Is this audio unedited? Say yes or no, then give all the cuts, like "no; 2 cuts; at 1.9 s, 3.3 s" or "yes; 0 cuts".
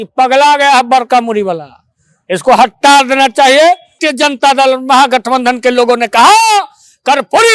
no; 1 cut; at 4.0 s